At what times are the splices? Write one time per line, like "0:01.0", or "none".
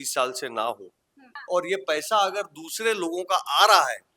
0:01.3